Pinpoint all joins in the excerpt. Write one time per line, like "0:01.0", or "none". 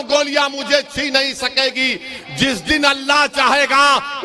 none